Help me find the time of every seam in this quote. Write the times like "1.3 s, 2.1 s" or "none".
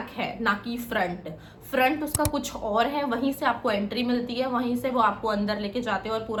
none